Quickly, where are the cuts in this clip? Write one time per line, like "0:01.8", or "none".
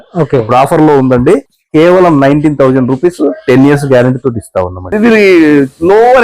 0:01.6
0:04.9